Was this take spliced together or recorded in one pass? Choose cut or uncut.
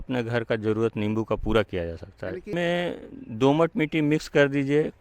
cut